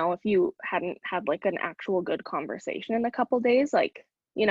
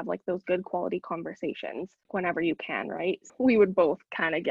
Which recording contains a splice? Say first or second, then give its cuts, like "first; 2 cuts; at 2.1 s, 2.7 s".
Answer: second; 2 cuts; at 2.1 s, 3.2 s